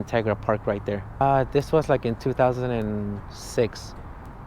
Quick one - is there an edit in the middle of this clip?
yes; 1 cut; at 1.2 s

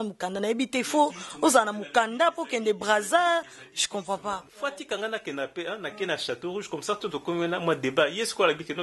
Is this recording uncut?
no; 1 cut; at 4.5 s

